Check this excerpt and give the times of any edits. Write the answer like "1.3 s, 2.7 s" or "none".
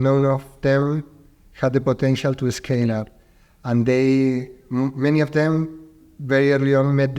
none